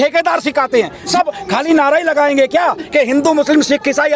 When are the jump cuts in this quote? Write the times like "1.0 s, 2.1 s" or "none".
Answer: 1.1 s